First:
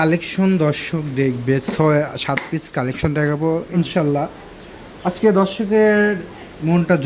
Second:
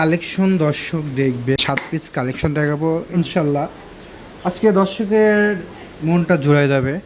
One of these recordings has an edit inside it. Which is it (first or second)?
second